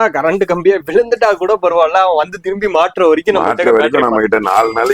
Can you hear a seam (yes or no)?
no